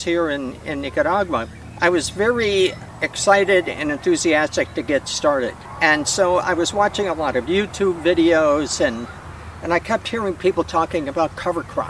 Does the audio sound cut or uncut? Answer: cut